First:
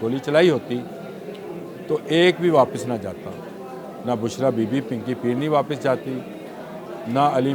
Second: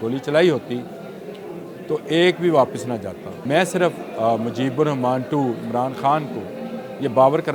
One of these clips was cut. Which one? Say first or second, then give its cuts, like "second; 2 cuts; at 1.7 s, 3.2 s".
second; 1 cut; at 3.3 s